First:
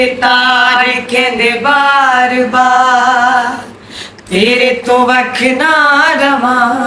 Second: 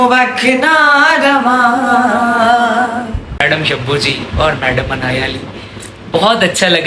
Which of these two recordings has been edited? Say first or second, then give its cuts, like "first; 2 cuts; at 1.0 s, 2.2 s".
second; 1 cut; at 3.3 s